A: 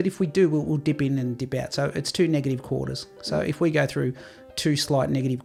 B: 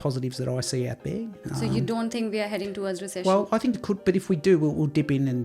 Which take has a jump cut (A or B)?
B